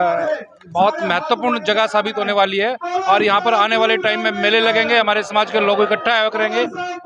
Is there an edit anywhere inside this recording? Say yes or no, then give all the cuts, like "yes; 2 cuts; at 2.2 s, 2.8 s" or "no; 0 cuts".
no; 0 cuts